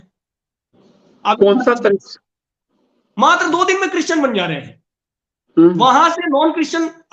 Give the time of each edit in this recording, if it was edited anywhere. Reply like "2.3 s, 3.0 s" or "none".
none